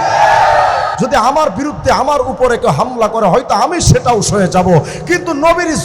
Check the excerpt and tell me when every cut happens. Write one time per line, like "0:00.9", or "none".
0:00.9